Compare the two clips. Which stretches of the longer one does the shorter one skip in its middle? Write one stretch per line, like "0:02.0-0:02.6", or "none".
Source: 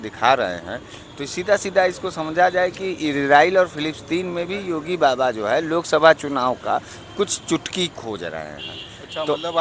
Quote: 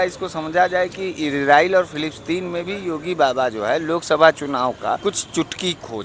0:06.8-0:07.1